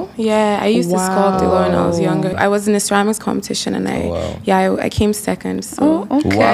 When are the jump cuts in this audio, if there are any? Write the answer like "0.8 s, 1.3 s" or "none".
2.4 s